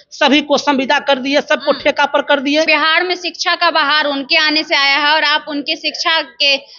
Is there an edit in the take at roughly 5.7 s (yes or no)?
no